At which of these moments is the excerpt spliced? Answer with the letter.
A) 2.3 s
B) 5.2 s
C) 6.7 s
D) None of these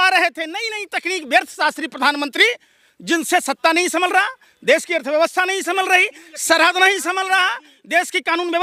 D